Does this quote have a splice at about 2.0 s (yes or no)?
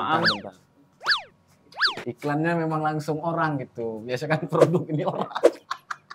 yes